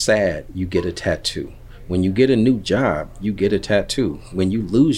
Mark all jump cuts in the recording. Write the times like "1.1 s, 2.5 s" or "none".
none